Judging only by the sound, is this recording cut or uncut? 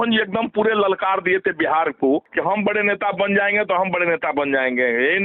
cut